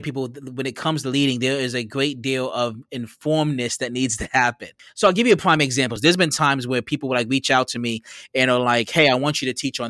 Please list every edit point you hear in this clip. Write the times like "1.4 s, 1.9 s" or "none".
4.8 s, 5.9 s